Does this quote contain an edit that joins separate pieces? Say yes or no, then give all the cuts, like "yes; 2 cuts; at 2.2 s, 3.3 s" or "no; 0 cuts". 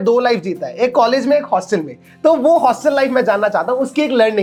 no; 0 cuts